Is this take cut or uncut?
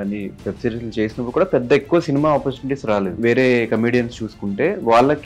cut